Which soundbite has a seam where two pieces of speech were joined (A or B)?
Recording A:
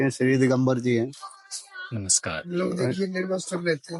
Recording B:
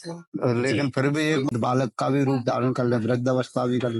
B